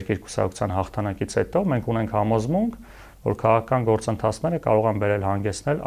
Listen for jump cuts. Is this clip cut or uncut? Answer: uncut